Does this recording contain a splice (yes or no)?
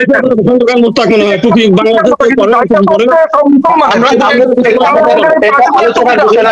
no